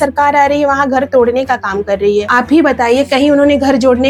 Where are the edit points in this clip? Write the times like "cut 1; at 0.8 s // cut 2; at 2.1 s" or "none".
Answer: none

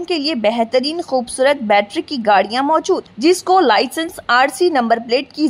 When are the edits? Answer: none

